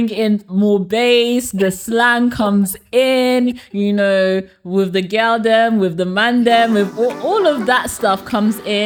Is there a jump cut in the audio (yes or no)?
no